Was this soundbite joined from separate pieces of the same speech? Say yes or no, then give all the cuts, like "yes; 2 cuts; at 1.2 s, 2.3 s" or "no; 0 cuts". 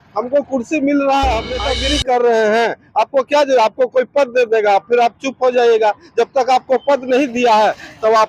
yes; 1 cut; at 1.7 s